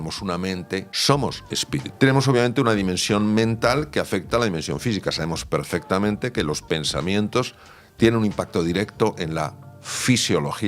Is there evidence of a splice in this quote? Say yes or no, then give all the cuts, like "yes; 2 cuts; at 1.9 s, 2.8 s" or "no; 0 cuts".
yes; 2 cuts; at 0.9 s, 1.9 s